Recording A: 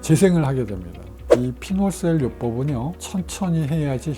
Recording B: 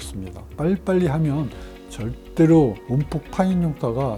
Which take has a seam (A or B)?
A